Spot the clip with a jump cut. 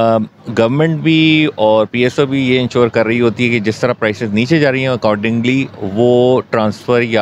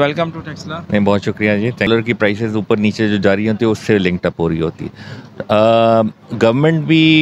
second; 1 cut; at 1.9 s

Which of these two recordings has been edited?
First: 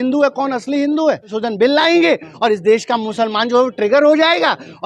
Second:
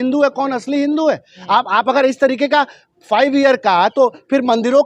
first; 1 cut; at 1.3 s

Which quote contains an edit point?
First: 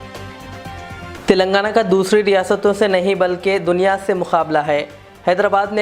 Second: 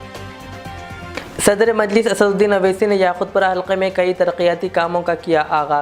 first; 1 cut; at 1.1 s

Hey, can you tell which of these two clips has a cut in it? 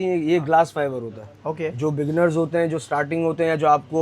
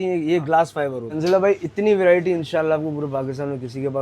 second; 1 cut; at 1.1 s

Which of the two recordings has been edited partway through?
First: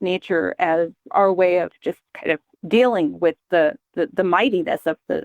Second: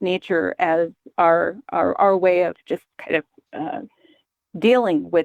first; 2 cuts; at 1.1 s, 2.5 s

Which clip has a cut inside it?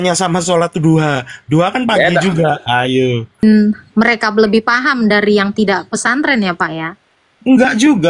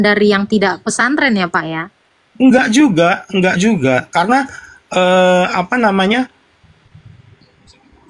first; 1 cut; at 3.4 s

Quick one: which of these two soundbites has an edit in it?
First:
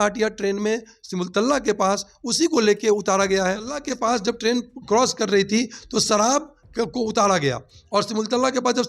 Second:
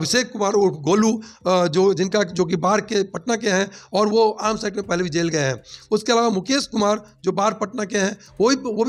first; 1 cut; at 3.9 s

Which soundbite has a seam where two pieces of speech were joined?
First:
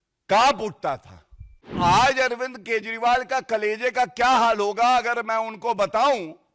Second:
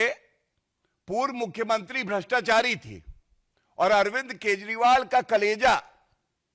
first; 1 cut; at 1.7 s

